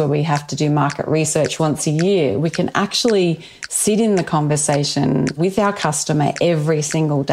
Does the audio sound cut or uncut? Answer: cut